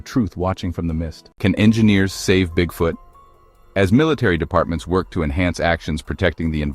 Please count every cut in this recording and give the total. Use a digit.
1